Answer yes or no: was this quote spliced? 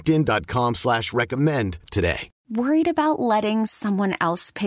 yes